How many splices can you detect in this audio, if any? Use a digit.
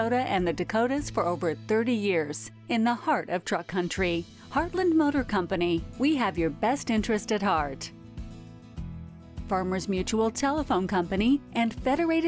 0